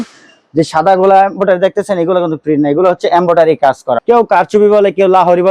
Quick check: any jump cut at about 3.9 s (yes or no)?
yes